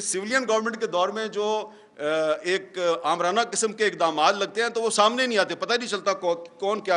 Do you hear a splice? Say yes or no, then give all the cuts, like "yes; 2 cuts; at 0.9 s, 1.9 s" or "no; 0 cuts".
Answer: no; 0 cuts